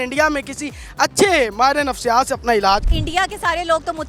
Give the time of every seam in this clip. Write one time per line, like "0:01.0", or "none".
0:03.0

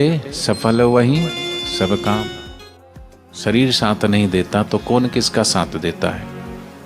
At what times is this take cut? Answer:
0:02.6

